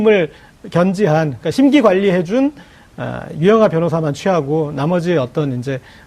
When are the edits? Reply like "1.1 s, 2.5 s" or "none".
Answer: 3.3 s